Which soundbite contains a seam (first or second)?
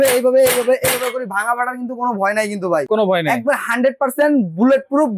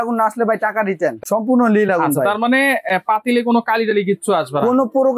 second